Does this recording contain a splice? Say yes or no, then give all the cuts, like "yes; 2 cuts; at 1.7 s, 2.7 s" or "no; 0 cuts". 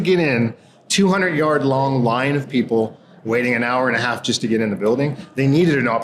no; 0 cuts